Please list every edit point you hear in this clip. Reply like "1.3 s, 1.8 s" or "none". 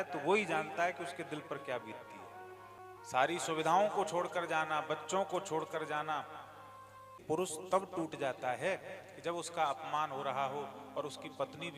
2.8 s, 7.1 s